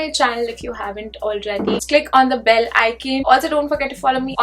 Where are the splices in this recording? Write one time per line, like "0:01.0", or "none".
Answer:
0:01.8